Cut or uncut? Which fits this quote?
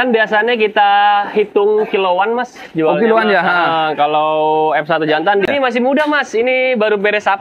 cut